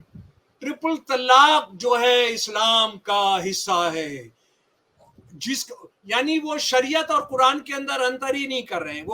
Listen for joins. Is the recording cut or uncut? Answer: uncut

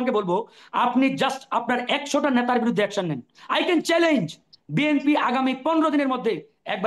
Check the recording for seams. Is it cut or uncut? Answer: uncut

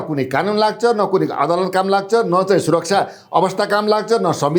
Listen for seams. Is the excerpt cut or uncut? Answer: uncut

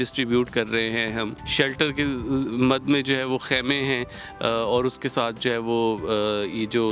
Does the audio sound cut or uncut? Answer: uncut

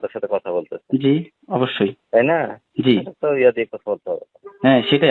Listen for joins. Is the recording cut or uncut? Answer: cut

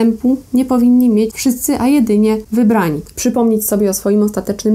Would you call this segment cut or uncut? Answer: cut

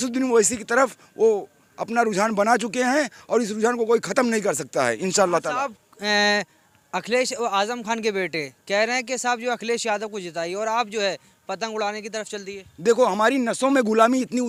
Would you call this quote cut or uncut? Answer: uncut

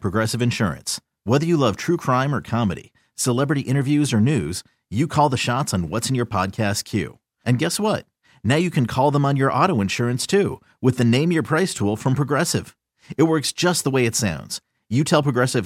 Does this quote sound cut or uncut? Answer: uncut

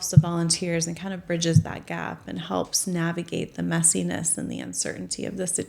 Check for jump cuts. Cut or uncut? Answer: uncut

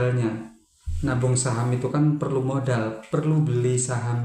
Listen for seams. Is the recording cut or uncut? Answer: uncut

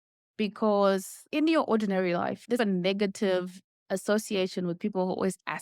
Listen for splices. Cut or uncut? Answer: cut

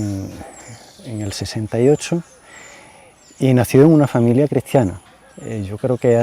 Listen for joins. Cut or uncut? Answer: cut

